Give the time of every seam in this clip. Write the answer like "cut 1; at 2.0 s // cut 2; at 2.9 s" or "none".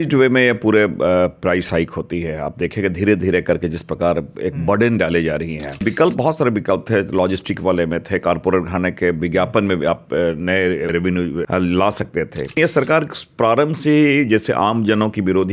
cut 1; at 5.8 s // cut 2; at 11.1 s // cut 3; at 12.6 s